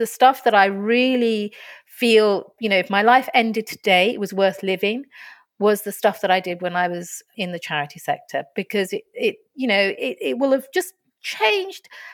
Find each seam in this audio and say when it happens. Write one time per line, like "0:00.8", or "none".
none